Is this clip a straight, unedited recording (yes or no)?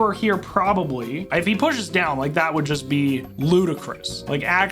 no